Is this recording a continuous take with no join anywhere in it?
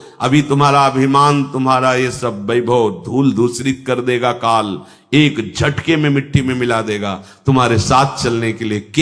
yes; 0 cuts

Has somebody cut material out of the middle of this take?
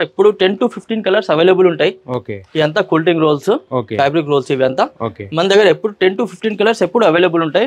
no; 0 cuts

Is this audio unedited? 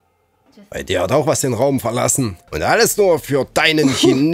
no; 1 cut; at 2.5 s

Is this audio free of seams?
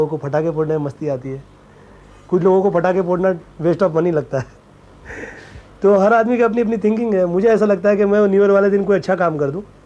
yes; 0 cuts

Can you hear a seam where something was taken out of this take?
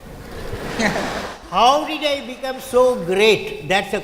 no; 0 cuts

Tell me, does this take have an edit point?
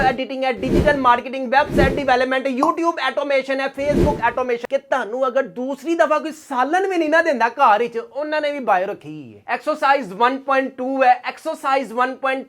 yes; 2 cuts; at 4.6 s, 9.4 s

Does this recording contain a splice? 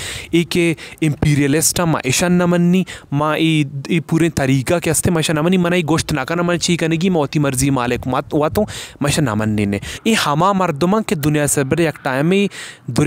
yes; 1 cut; at 9.9 s

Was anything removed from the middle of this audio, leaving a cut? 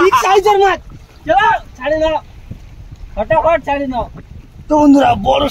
no; 0 cuts

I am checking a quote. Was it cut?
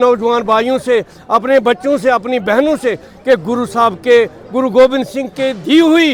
no; 0 cuts

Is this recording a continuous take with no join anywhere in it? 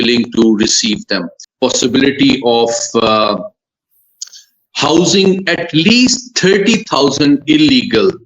no; 1 cut; at 1.4 s

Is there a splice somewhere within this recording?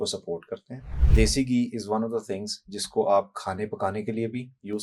yes; 1 cut; at 1.0 s

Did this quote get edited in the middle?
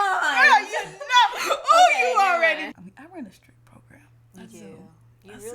yes; 1 cut; at 2.6 s

